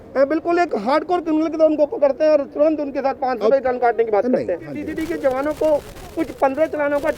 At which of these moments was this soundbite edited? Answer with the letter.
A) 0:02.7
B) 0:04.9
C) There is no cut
B